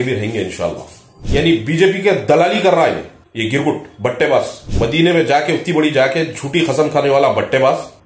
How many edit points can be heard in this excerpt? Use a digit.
2